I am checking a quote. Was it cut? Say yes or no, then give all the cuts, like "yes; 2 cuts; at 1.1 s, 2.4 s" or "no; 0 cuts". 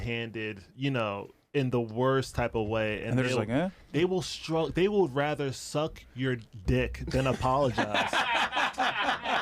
no; 0 cuts